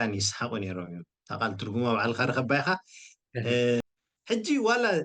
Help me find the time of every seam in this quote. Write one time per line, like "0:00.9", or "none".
0:03.8